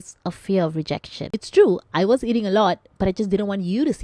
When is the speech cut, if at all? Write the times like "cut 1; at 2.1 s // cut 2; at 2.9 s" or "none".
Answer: cut 1; at 1.4 s